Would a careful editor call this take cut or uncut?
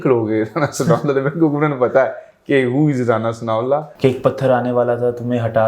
cut